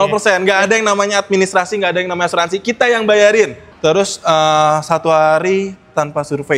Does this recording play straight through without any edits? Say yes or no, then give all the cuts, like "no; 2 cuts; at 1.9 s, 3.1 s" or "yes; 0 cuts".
no; 1 cut; at 3.6 s